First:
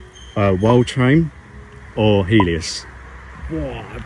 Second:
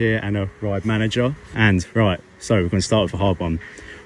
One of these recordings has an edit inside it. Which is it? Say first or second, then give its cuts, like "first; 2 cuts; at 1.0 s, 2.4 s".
second; 1 cut; at 1.4 s